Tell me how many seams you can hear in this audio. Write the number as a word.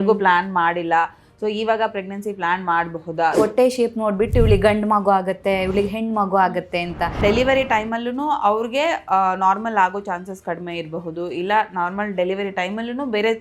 two